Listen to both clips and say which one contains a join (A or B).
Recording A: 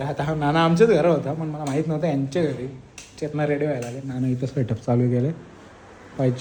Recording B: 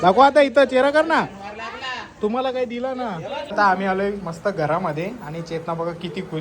B